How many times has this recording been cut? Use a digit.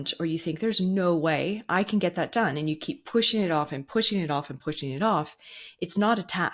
0